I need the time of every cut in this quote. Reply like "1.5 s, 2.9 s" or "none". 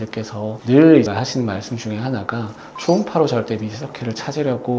none